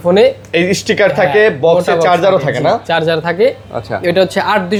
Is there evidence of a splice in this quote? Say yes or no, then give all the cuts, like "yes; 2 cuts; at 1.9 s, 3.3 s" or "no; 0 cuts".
no; 0 cuts